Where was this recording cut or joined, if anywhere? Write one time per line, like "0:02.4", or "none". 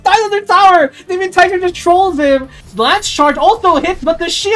0:02.6